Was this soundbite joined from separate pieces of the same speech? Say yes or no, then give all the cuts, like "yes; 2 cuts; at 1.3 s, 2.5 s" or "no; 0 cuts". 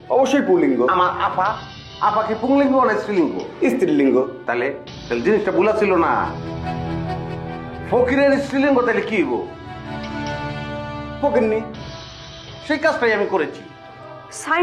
no; 0 cuts